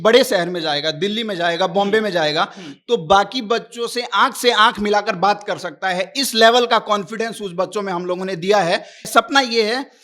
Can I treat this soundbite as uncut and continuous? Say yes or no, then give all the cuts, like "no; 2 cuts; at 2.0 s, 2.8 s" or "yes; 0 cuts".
no; 1 cut; at 9.1 s